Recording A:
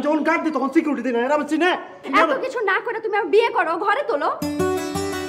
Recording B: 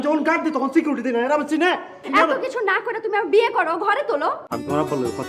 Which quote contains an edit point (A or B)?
B